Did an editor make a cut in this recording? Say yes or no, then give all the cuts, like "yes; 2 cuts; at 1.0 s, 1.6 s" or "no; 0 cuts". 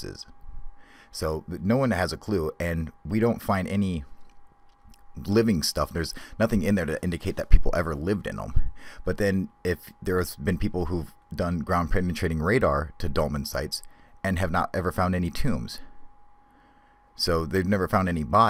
no; 0 cuts